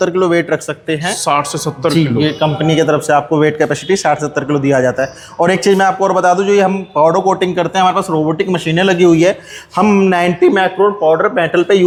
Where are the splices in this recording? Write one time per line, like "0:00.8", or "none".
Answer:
none

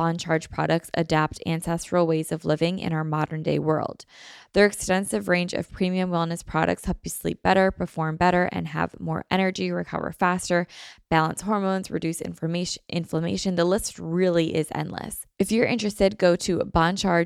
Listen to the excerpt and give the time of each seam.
0:15.2

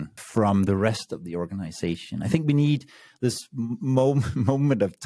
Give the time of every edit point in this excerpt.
none

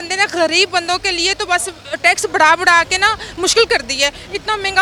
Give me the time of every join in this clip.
none

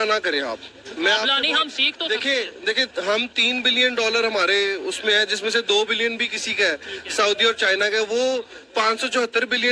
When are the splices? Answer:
none

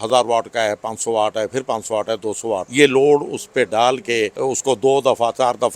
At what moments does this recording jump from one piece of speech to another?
0:02.7
0:04.3

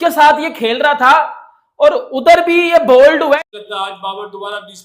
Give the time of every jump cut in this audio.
0:03.4

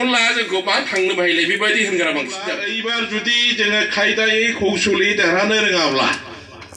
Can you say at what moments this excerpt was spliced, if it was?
0:02.6

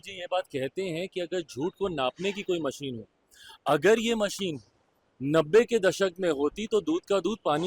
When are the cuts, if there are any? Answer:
none

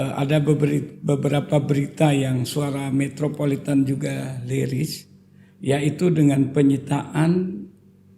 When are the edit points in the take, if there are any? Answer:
none

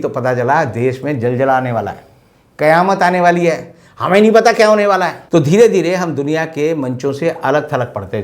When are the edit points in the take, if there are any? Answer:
0:05.2

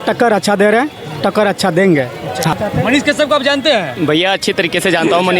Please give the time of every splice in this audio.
0:02.5

